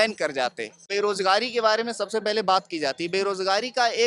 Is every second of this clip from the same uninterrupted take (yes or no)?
no